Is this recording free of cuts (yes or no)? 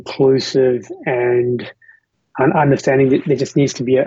no